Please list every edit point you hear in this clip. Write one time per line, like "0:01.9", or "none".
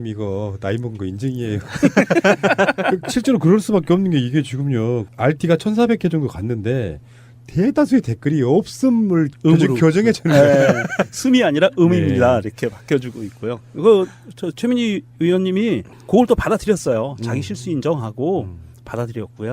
0:18.5